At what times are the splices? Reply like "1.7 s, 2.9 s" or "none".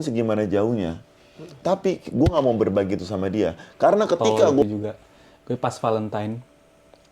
4.7 s